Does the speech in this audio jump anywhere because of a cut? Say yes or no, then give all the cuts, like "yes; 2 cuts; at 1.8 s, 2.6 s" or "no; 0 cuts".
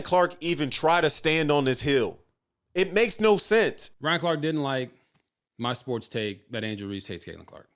yes; 1 cut; at 3.8 s